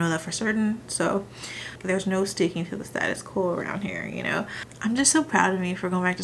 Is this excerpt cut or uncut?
cut